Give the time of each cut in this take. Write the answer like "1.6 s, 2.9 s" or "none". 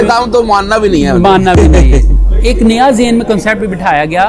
2.1 s